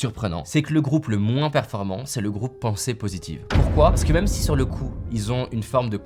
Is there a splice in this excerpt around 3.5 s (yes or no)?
no